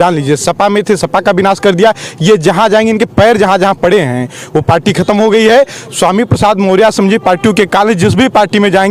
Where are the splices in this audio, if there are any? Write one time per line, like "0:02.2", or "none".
none